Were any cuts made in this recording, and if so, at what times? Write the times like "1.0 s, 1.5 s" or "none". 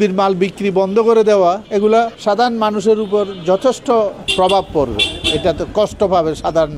1.7 s, 4.2 s